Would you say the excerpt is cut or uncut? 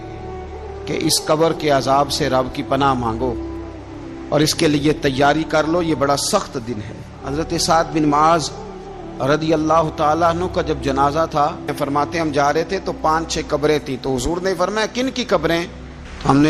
cut